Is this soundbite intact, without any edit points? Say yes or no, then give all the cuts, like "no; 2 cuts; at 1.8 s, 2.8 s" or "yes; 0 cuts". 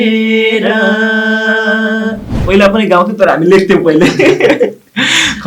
no; 1 cut; at 2.3 s